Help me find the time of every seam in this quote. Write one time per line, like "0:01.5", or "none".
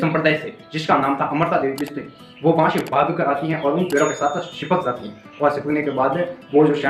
none